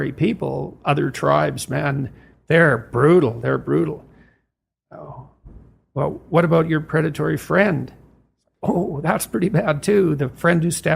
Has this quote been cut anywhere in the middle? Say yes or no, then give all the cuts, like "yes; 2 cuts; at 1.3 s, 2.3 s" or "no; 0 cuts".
no; 0 cuts